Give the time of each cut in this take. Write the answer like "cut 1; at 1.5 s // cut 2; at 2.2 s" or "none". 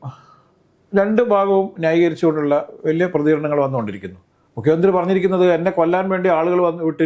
none